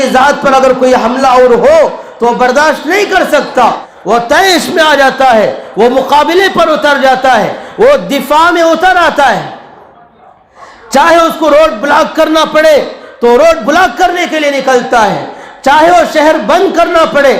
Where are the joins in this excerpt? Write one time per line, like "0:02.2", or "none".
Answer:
0:03.9